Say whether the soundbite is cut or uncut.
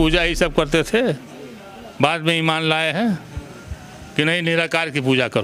uncut